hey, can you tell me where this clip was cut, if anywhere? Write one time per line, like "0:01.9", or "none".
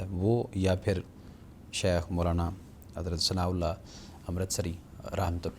none

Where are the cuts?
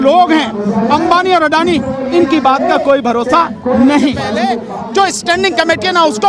0:04.4

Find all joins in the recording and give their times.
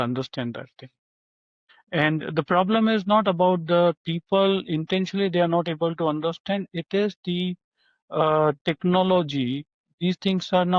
0:01.7

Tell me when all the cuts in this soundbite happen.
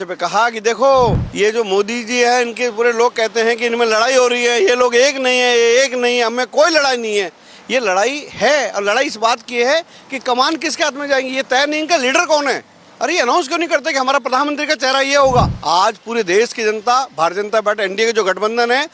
0:01.2
0:15.6

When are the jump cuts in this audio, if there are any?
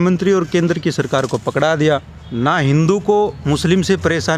0:02.2

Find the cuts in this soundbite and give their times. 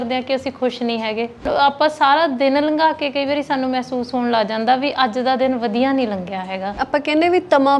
0:01.5
0:06.7

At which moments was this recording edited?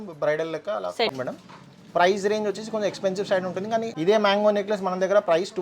0:01.1
0:03.9

